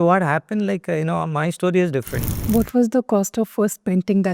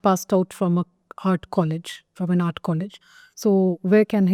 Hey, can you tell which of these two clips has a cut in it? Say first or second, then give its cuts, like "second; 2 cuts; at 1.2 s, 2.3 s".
first; 1 cut; at 2.3 s